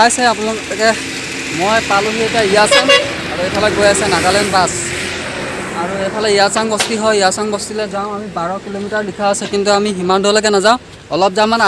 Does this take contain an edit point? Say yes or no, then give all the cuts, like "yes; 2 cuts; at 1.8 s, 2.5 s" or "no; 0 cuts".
no; 0 cuts